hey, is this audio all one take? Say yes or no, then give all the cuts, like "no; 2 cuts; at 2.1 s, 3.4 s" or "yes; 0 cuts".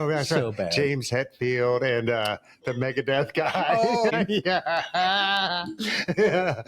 no; 1 cut; at 4.1 s